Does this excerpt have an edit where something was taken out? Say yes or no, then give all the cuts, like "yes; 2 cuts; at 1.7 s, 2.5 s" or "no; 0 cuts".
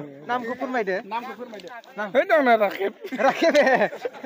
no; 0 cuts